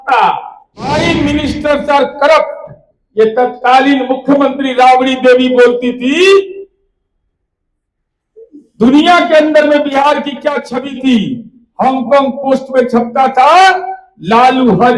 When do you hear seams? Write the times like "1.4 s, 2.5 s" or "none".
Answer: 0.9 s